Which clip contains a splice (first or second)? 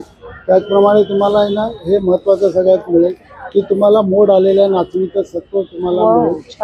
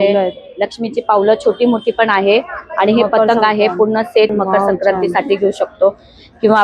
second